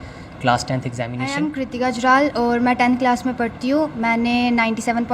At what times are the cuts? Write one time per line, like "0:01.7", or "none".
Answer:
0:01.2